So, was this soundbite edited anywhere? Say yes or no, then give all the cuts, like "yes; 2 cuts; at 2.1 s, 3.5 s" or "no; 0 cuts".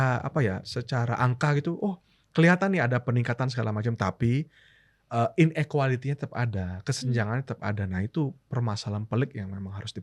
no; 0 cuts